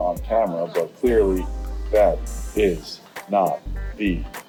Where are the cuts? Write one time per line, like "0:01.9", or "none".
none